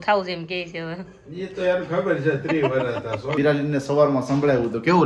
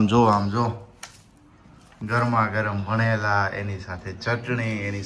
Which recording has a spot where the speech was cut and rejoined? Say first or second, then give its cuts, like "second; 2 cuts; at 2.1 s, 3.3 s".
first; 1 cut; at 3.3 s